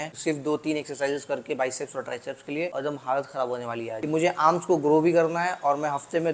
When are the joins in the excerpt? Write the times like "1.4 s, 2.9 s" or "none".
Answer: 3.8 s